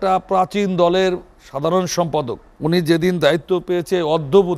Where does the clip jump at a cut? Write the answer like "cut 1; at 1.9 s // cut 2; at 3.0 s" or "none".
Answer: cut 1; at 2.5 s